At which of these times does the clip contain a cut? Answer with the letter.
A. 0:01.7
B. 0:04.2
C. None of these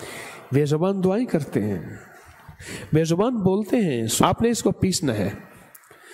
B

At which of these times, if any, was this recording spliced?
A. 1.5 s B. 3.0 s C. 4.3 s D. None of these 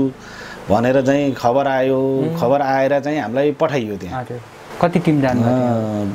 D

